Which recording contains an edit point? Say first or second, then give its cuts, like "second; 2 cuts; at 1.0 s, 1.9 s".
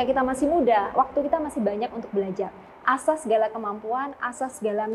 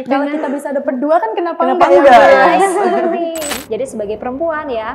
second; 1 cut; at 3.5 s